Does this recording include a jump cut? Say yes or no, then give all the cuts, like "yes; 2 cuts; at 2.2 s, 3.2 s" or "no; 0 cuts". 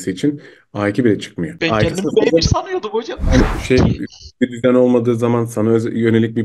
yes; 1 cut; at 3.4 s